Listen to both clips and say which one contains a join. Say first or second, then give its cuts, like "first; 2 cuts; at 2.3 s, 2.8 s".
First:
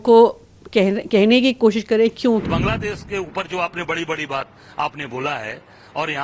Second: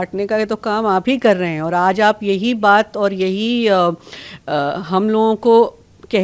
first; 1 cut; at 2.5 s